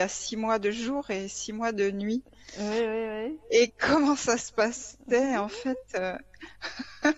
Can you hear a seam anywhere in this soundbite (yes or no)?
no